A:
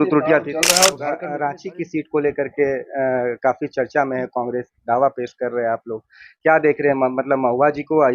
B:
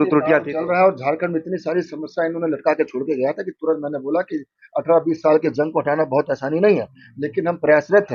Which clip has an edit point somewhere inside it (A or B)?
A